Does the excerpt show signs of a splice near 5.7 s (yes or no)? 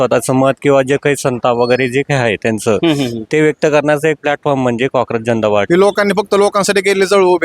yes